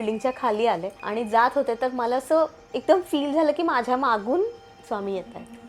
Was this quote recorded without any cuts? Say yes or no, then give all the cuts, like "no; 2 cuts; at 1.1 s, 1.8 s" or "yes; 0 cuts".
no; 1 cut; at 1.0 s